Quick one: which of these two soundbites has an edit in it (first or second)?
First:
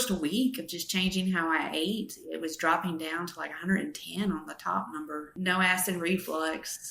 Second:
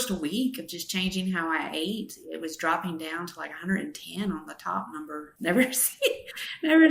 first